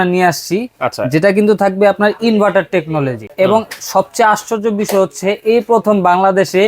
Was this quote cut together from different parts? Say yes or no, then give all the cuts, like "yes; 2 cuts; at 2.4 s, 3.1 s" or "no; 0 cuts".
yes; 1 cut; at 3.3 s